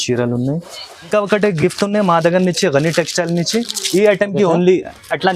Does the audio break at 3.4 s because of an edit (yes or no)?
no